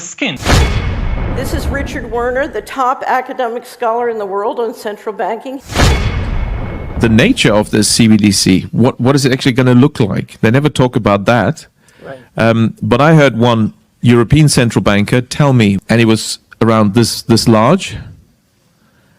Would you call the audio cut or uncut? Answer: cut